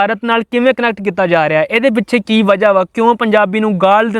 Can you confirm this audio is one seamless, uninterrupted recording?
yes; 0 cuts

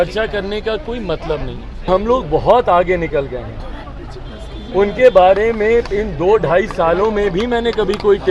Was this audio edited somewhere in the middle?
yes; 1 cut; at 1.9 s

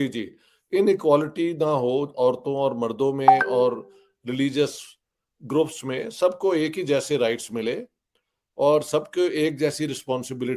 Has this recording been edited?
no; 0 cuts

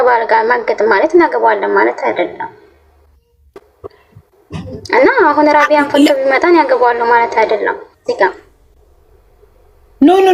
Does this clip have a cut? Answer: no; 0 cuts

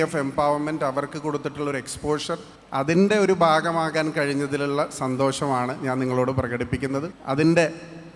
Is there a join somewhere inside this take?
yes; 2 cuts; at 2.5 s, 7.2 s

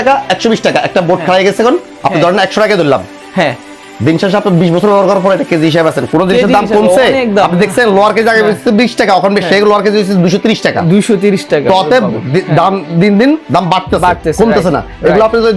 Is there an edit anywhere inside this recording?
no; 0 cuts

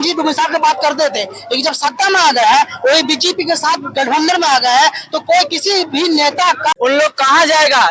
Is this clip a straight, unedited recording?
no; 1 cut; at 6.7 s

